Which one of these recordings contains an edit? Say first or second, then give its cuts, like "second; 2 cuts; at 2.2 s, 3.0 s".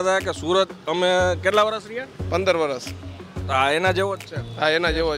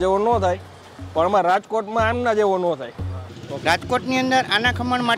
second; 1 cut; at 3.2 s